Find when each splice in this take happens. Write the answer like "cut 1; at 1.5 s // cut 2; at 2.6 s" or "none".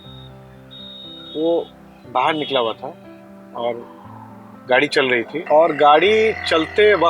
cut 1; at 5.4 s

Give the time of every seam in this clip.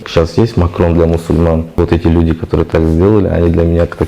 cut 1; at 1.8 s

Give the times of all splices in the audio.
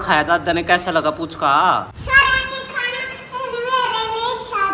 cut 1; at 1.9 s

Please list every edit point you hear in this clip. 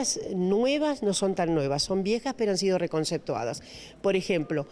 none

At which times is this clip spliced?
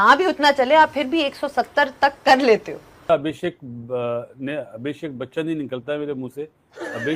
cut 1; at 3.1 s

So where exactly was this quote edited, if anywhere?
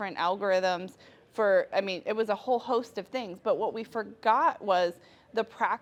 none

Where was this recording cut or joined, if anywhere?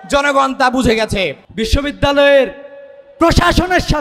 cut 1; at 1.4 s

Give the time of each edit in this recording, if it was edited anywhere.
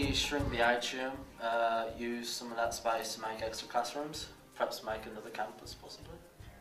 cut 1; at 5.0 s

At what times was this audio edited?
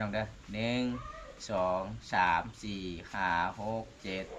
none

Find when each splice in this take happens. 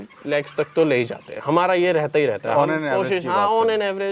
none

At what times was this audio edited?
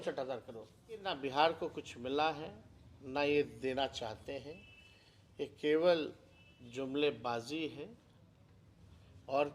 cut 1; at 1.1 s

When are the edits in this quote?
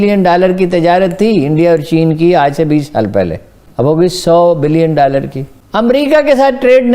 cut 1; at 5.6 s

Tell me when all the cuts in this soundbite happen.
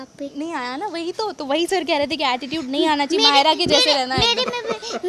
none

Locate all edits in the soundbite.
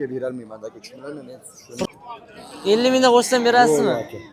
cut 1; at 1.9 s

